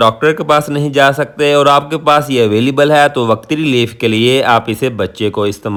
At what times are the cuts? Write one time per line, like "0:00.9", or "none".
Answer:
none